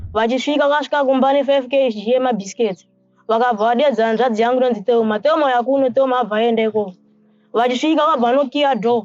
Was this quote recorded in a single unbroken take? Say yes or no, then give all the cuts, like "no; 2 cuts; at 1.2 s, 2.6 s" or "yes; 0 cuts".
yes; 0 cuts